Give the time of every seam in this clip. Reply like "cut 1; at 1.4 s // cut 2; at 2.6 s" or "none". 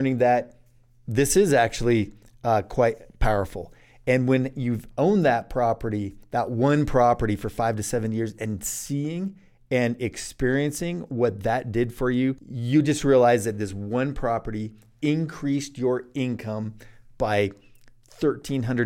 cut 1; at 12.5 s